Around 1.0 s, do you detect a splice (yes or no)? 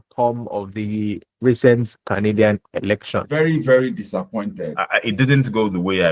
no